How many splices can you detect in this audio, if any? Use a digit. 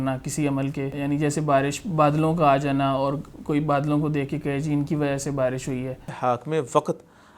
2